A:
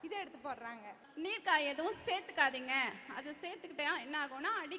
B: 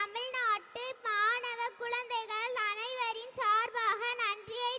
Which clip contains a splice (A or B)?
A